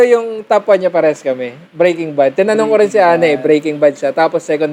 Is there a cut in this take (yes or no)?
no